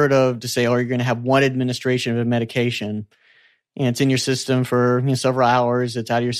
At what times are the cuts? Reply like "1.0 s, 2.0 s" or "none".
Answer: none